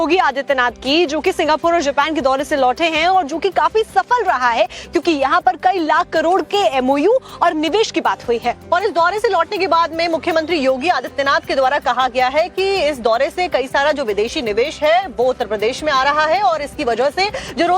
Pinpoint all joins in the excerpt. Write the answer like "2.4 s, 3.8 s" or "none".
10.2 s